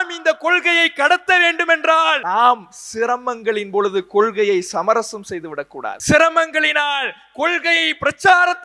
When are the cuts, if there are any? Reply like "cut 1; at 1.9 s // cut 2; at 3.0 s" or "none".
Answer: cut 1; at 2.2 s // cut 2; at 6.0 s